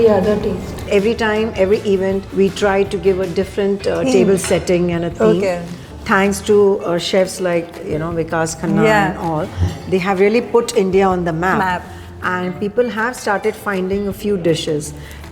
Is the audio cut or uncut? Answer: cut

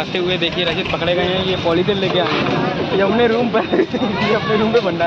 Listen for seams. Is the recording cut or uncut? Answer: cut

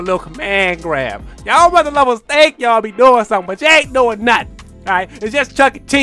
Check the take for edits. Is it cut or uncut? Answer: uncut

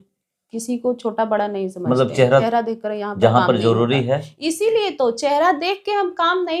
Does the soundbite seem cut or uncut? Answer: cut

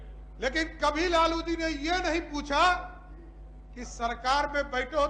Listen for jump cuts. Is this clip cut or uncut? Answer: uncut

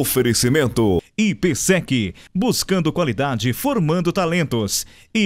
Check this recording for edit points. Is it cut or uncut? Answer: cut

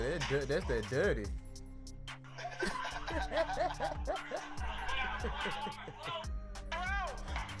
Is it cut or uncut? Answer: uncut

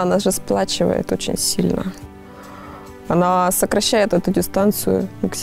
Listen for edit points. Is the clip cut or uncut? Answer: uncut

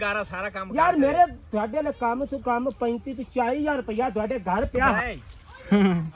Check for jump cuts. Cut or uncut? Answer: uncut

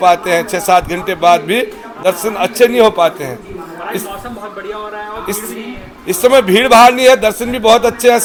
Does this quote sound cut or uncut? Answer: uncut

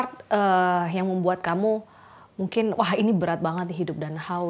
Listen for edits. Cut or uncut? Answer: uncut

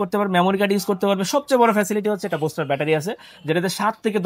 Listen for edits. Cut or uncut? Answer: uncut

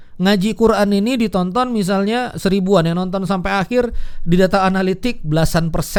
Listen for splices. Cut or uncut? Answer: uncut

